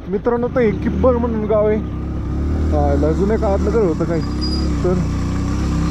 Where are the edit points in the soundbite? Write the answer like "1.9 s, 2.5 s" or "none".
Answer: none